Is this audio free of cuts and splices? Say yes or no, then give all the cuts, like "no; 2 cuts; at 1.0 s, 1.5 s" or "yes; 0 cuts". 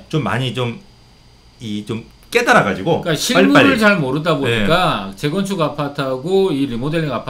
yes; 0 cuts